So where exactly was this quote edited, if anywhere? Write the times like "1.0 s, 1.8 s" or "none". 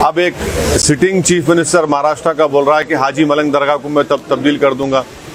none